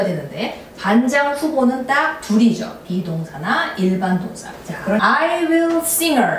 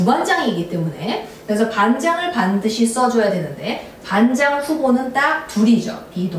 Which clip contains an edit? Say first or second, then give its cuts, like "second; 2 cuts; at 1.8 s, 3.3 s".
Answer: first; 1 cut; at 5.0 s